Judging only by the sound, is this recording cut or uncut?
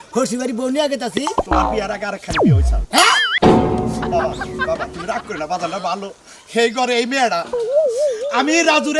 cut